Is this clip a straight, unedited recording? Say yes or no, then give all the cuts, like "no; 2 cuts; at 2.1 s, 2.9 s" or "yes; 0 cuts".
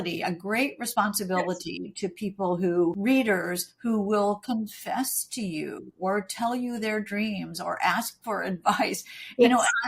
no; 1 cut; at 3.0 s